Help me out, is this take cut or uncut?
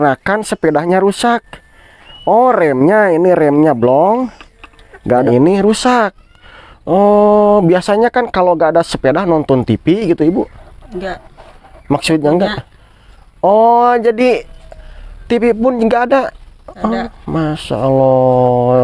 cut